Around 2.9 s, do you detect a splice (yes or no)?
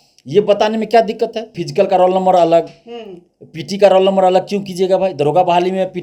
no